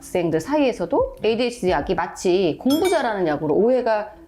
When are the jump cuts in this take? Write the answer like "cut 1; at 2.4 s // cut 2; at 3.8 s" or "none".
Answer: none